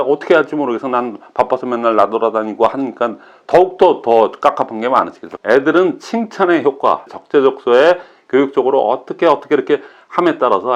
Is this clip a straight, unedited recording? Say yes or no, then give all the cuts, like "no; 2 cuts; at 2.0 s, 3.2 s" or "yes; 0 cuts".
no; 2 cuts; at 5.2 s, 7.1 s